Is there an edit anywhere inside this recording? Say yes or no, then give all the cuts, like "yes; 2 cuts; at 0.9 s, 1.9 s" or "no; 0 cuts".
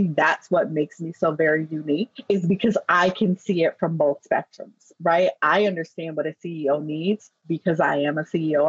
yes; 1 cut; at 2.1 s